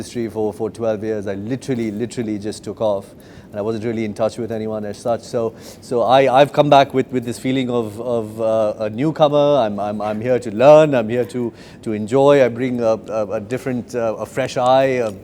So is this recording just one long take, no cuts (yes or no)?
yes